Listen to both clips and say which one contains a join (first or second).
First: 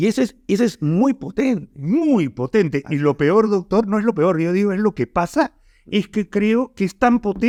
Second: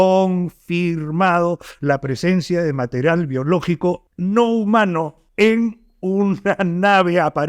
second